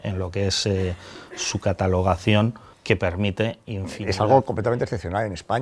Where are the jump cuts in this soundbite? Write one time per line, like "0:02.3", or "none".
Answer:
0:02.7
0:03.9